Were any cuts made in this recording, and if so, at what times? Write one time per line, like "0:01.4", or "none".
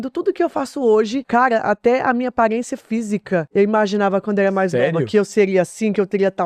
0:01.2
0:03.5